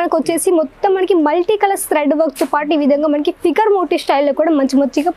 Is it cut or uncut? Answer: uncut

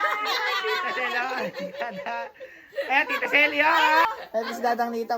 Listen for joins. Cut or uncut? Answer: cut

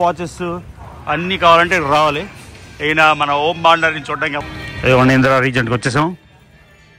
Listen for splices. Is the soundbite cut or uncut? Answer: uncut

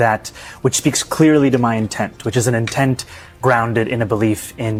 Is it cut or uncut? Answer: uncut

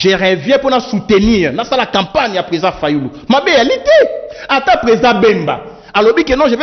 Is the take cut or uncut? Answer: uncut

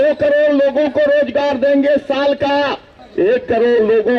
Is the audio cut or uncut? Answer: cut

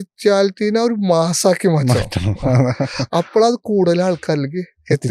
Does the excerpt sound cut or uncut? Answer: uncut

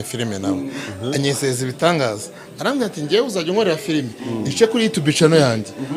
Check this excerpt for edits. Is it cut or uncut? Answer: uncut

